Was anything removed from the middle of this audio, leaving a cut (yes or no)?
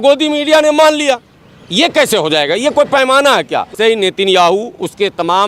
yes